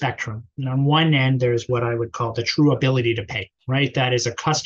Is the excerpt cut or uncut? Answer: cut